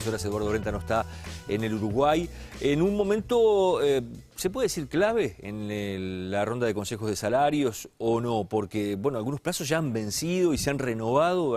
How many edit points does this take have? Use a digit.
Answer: 1